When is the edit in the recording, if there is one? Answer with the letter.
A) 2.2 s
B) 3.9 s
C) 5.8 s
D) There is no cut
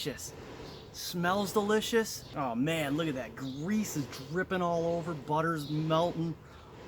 A